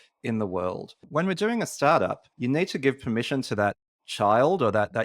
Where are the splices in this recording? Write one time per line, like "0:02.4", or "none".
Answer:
0:01.0
0:02.3